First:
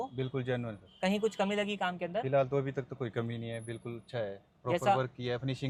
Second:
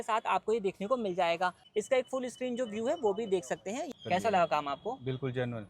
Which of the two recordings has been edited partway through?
second; 2 cuts; at 1.6 s, 3.8 s

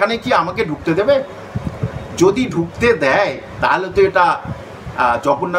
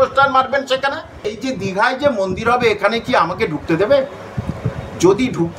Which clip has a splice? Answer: second; 1 cut; at 1.4 s

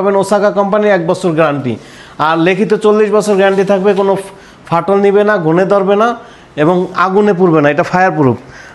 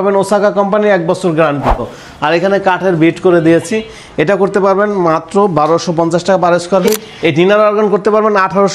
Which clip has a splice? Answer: second; 2 cuts; at 2.0 s, 7.1 s

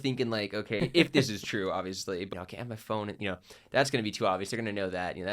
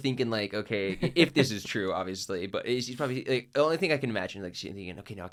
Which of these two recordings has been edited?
first; 2 cuts; at 0.8 s, 2.3 s

